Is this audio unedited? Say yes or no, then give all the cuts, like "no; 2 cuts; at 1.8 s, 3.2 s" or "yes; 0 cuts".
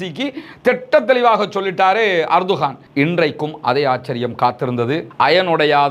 no; 1 cut; at 2.8 s